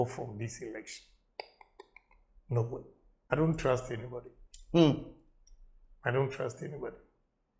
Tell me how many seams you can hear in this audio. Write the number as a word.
one